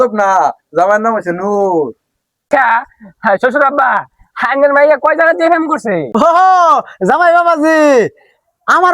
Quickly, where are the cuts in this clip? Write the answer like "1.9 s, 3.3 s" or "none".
2.4 s